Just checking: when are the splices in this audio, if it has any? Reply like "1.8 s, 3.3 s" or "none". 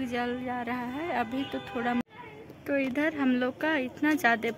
2.0 s